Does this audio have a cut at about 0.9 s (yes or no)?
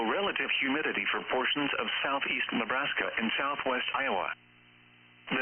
yes